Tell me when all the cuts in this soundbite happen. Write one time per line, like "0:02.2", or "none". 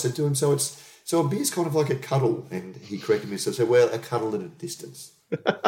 none